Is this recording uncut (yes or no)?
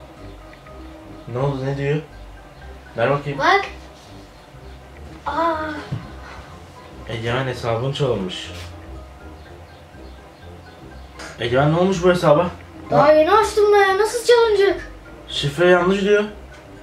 yes